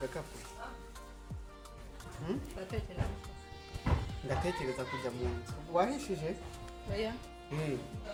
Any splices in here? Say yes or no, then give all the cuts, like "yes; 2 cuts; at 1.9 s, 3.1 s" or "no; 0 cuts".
no; 0 cuts